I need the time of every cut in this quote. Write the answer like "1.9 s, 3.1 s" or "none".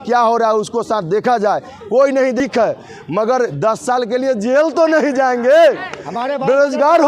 2.4 s